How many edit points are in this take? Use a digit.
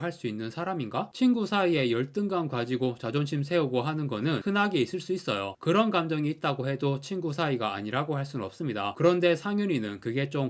0